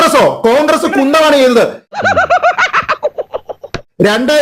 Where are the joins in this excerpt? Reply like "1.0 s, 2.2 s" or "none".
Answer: none